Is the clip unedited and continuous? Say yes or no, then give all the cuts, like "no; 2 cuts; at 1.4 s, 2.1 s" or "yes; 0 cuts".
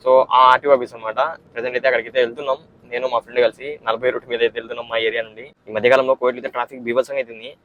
yes; 0 cuts